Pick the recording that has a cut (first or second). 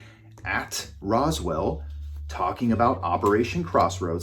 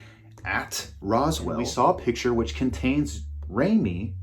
second